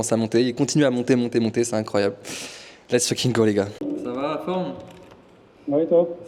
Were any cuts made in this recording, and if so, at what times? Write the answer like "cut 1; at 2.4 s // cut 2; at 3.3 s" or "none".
none